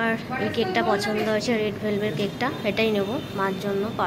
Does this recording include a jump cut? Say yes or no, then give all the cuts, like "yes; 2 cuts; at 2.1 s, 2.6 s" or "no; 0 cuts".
no; 0 cuts